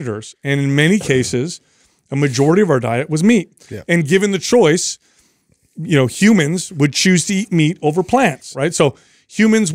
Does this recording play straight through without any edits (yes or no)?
no